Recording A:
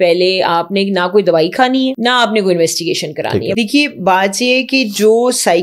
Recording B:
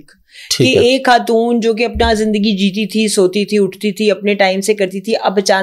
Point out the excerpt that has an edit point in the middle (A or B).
A